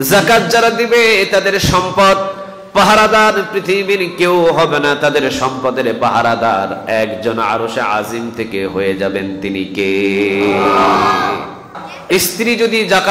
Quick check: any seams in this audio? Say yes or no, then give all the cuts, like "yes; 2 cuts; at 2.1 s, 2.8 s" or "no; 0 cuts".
yes; 1 cut; at 11.7 s